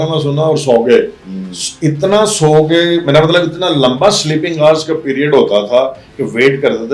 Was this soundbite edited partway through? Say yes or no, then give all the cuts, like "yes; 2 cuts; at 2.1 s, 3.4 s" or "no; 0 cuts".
no; 0 cuts